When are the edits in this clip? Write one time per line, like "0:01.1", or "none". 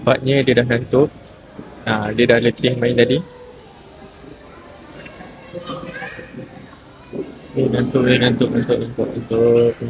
none